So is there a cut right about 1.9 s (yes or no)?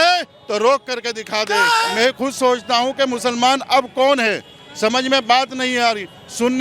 yes